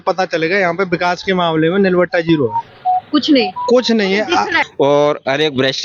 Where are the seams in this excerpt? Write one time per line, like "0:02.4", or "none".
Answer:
0:04.6